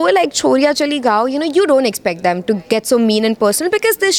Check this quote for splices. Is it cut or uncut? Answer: uncut